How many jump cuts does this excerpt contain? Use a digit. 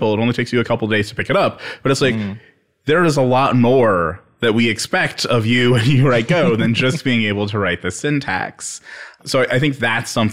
0